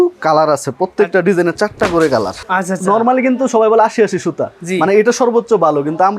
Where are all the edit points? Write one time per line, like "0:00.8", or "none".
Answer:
0:02.4